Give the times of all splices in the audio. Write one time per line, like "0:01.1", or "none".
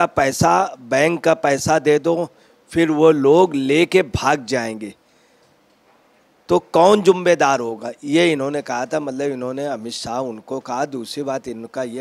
none